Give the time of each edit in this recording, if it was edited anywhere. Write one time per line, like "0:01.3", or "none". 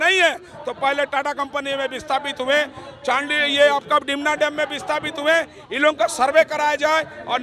none